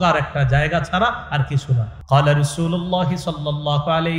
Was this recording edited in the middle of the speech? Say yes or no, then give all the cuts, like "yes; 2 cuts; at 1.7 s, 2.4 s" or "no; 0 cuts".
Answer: yes; 1 cut; at 1.9 s